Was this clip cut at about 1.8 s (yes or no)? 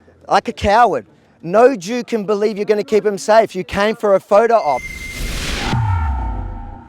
no